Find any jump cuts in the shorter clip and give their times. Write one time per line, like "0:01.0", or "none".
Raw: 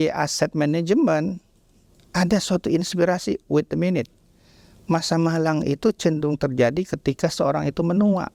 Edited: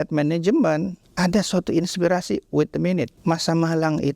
0:01.0
0:03.1